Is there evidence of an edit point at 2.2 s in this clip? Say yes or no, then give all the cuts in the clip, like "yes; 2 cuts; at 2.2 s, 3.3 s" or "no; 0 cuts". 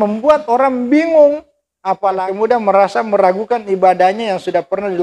yes; 1 cut; at 2.2 s